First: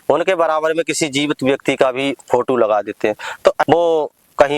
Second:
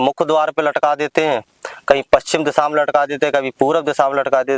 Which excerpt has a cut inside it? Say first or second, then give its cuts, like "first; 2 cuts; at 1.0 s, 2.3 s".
first; 1 cut; at 3.6 s